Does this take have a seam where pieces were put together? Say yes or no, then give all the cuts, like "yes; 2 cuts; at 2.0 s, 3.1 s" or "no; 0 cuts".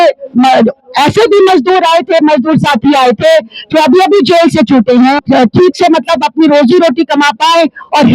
yes; 1 cut; at 5.2 s